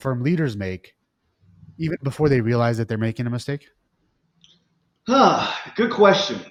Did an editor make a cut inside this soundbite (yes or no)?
no